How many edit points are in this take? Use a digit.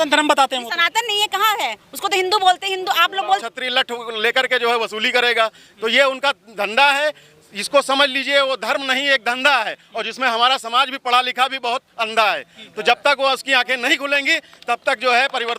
1